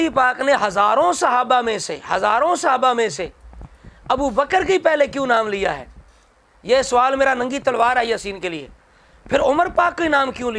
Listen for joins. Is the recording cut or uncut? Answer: uncut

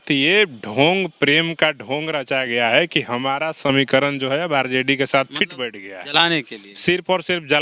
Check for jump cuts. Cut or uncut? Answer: uncut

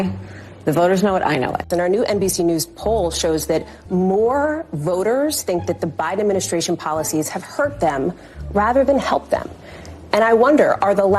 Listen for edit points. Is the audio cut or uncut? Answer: cut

